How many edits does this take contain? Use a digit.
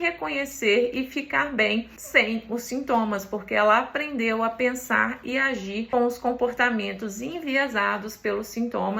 2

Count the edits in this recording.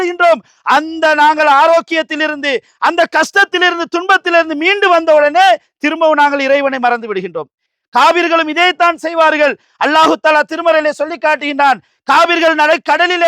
1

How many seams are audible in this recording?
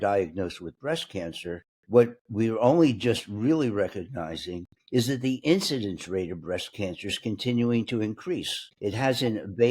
0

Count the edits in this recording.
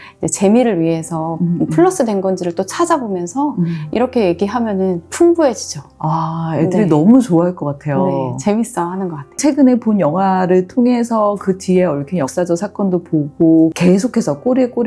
2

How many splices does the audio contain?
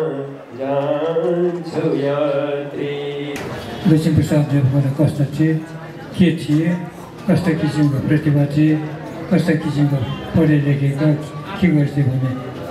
1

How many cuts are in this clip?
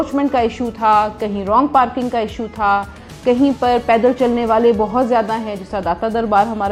0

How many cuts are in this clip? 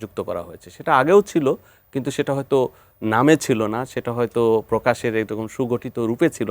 0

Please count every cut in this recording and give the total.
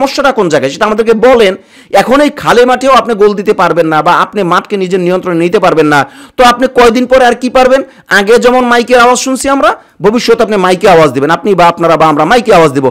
0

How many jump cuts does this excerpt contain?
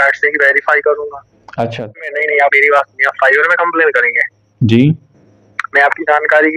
1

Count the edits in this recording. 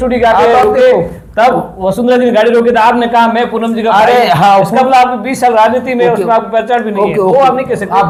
0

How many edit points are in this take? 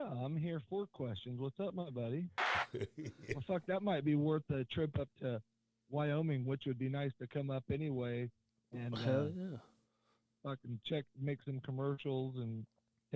1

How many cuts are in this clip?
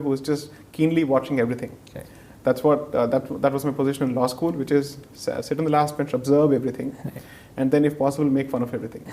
0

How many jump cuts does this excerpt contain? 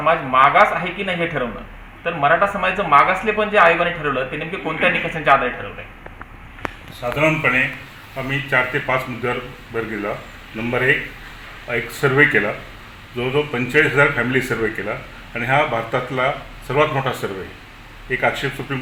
0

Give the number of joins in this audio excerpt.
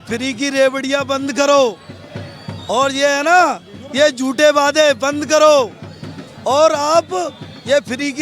0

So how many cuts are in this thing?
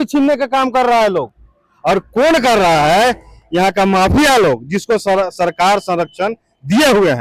0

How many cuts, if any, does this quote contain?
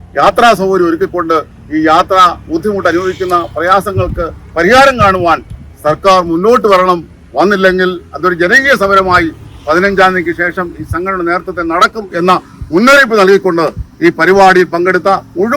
0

